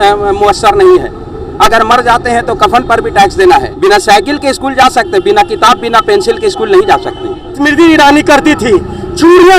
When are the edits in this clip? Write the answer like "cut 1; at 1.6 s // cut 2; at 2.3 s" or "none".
cut 1; at 3.7 s // cut 2; at 7.6 s

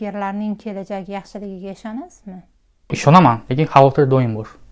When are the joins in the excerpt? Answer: cut 1; at 3.0 s

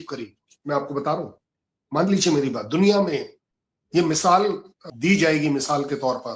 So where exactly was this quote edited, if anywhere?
cut 1; at 4.8 s

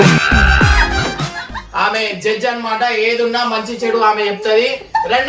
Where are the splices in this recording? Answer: cut 1; at 1.6 s

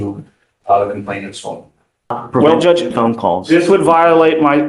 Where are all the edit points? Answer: cut 1; at 2.2 s

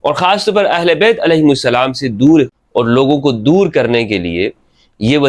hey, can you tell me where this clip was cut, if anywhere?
cut 1; at 2.6 s

